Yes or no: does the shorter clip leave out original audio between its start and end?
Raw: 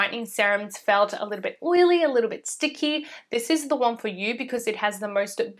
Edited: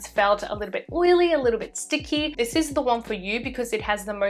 yes